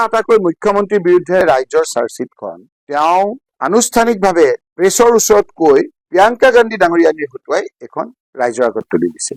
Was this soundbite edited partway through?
no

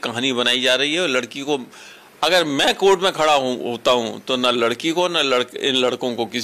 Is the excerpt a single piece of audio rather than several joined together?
yes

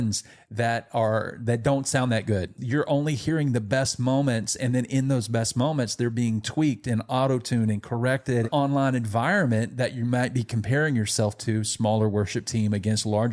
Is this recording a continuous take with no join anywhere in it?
no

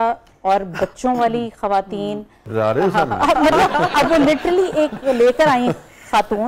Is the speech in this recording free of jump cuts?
no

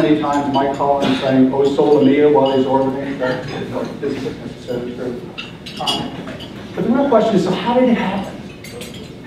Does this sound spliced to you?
no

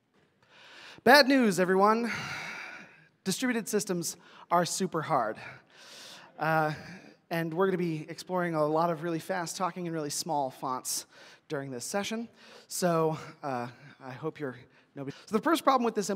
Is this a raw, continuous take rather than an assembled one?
yes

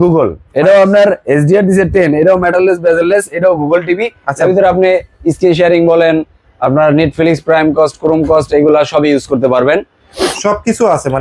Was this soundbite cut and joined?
no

